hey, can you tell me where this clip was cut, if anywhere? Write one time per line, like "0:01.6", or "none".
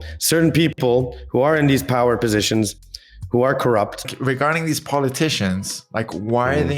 0:04.1